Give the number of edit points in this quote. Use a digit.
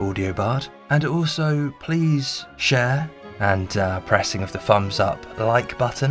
1